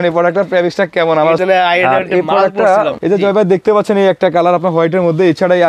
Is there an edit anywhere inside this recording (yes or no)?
yes